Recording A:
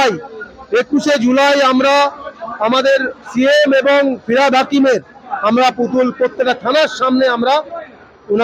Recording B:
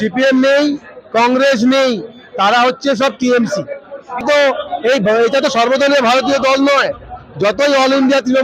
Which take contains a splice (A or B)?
B